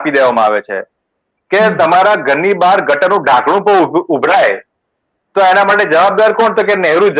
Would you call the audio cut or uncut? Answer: uncut